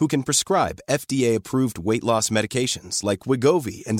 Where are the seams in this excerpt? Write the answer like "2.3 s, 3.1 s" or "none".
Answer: none